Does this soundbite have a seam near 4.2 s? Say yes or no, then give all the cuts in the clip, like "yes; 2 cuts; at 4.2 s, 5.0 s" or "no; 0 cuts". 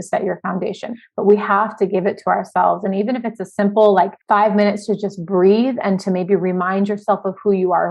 yes; 2 cuts; at 0.9 s, 4.2 s